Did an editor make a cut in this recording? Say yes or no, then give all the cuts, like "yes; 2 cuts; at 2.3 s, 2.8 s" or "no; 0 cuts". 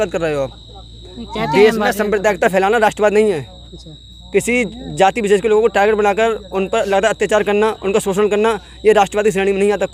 no; 0 cuts